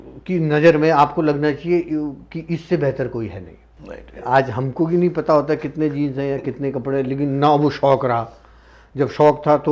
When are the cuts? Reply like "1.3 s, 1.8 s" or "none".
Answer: 4.2 s